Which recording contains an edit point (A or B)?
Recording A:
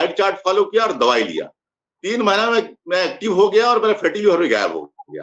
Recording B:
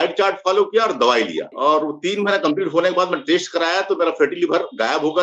B